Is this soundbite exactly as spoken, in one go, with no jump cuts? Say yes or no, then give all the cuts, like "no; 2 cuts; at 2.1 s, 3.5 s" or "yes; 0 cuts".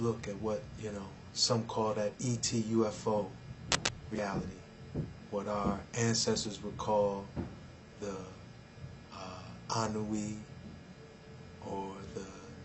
no; 1 cut; at 1.7 s